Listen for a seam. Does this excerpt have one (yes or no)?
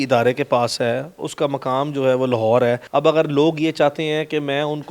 no